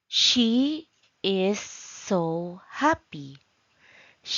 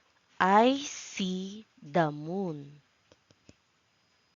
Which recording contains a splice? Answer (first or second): second